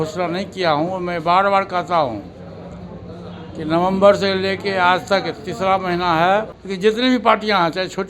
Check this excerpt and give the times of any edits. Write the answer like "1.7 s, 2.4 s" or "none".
6.6 s